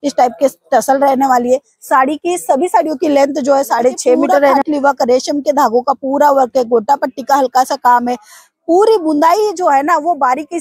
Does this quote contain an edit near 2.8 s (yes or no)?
no